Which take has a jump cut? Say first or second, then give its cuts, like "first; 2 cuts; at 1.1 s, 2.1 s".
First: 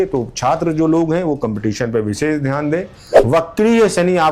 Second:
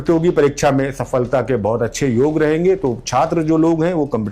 first; 1 cut; at 3.0 s